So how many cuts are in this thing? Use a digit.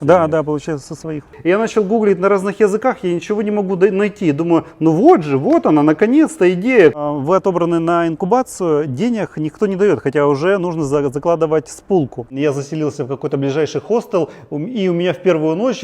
3